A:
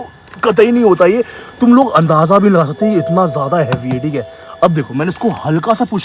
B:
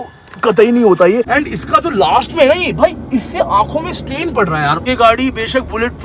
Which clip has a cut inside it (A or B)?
B